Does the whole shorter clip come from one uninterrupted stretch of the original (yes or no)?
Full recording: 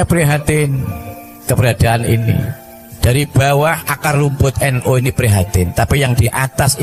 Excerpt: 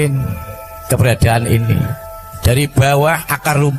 yes